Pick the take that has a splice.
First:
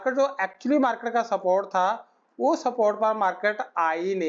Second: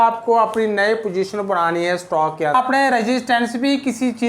second; 1 cut; at 2.5 s

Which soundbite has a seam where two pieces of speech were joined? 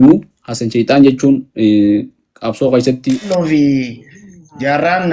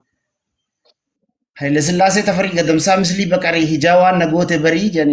first; 1 cut; at 3.2 s

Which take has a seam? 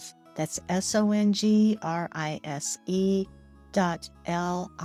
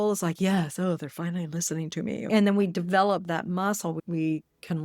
second; 1 cut; at 2.3 s

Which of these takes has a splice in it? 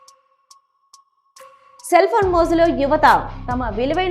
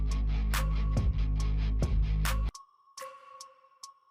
first; 1 cut; at 1.6 s

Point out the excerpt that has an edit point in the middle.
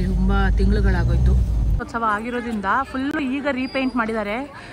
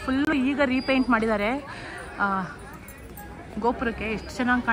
first; 1 cut; at 1.8 s

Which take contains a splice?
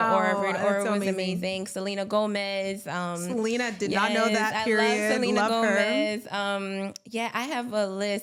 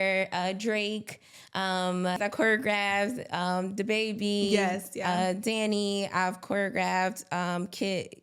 second; 1 cut; at 2.2 s

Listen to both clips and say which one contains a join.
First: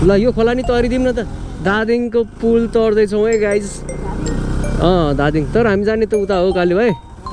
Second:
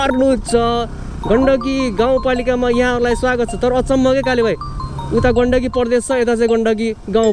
first; 1 cut; at 1.4 s

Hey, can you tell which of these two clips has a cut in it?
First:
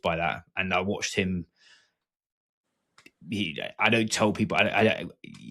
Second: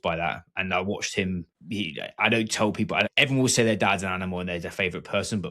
second; 2 cuts; at 1.5 s, 3.1 s

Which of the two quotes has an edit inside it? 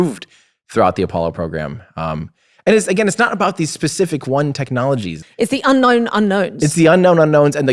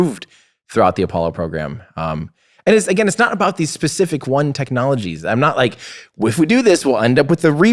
first; 1 cut; at 5.2 s

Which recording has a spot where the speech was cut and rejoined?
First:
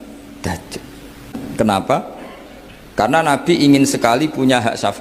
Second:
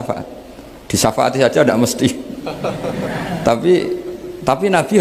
first; 1 cut; at 1.4 s

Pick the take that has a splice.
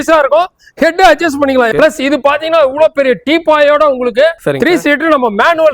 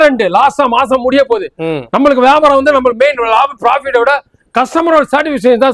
first; 2 cuts; at 1.7 s, 4.4 s

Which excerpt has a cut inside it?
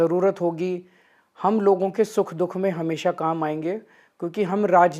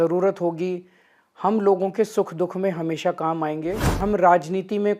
second; 1 cut; at 4.0 s

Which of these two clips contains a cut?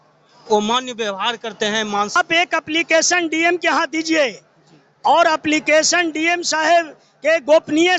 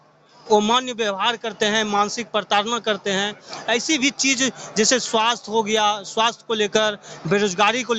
first; 1 cut; at 2.2 s

